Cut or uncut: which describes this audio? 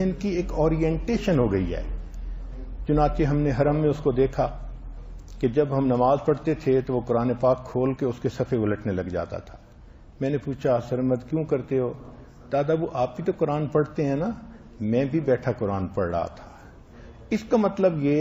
cut